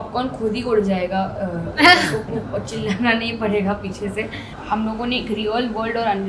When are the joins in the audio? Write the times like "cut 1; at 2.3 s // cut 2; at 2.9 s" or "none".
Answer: cut 1; at 4.6 s